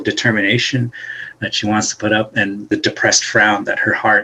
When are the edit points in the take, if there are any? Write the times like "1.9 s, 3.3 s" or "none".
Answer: 2.7 s